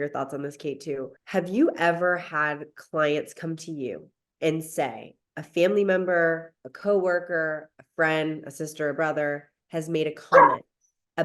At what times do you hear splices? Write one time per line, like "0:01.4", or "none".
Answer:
0:01.2